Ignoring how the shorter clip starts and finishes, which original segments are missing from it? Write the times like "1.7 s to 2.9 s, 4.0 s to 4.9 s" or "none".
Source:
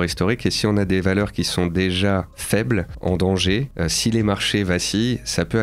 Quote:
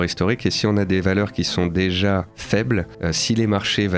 2.9 s to 3.7 s